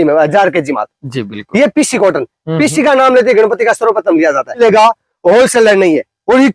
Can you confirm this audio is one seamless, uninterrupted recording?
no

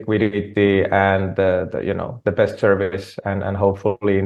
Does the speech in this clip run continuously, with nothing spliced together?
yes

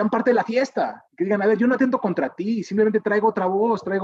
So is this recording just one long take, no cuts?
no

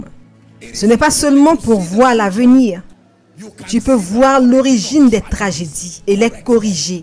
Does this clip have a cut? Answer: yes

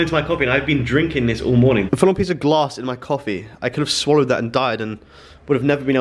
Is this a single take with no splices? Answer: no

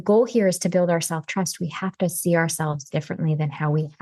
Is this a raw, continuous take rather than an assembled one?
yes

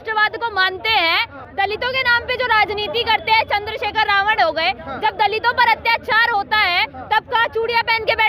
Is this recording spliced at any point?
yes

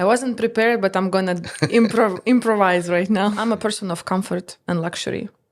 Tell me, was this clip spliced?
yes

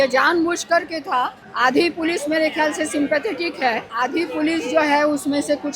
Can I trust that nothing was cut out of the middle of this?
no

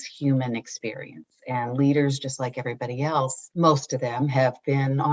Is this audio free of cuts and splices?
no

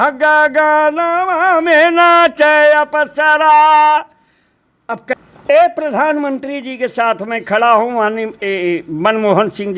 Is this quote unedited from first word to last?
no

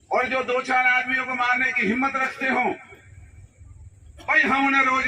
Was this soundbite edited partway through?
no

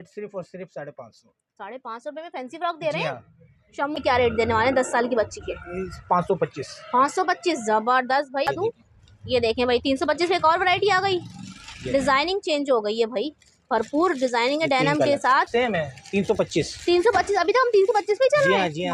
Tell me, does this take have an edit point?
yes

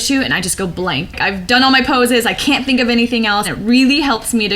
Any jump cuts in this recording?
yes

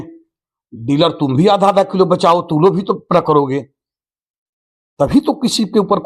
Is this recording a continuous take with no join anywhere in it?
yes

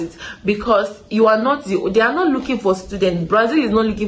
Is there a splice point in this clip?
no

